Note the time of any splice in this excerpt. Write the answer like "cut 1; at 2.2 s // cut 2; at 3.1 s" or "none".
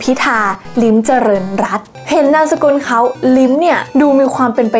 none